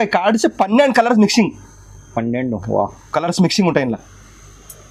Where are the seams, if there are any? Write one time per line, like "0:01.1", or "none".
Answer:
none